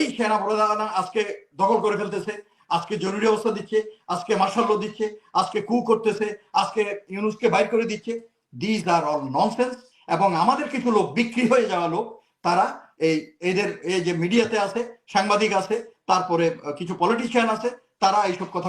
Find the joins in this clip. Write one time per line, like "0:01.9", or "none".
none

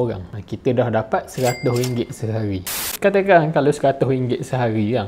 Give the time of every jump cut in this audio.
0:03.0

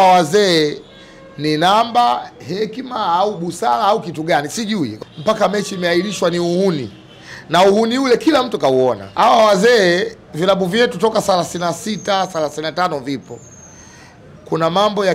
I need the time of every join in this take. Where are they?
0:05.0
0:09.1

